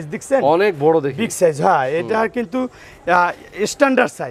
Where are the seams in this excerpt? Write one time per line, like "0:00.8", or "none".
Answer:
none